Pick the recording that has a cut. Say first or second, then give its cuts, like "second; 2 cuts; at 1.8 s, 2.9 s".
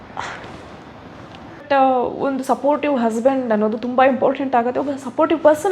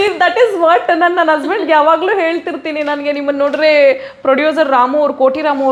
first; 1 cut; at 1.6 s